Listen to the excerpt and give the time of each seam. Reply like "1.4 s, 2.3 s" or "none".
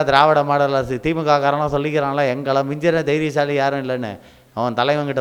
none